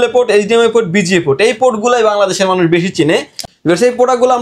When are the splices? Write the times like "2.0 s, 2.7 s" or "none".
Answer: 3.4 s